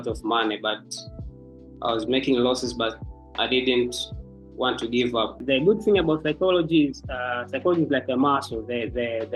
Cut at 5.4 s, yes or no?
yes